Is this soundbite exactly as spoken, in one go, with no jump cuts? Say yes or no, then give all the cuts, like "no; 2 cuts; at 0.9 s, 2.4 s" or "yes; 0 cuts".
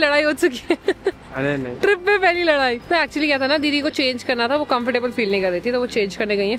yes; 0 cuts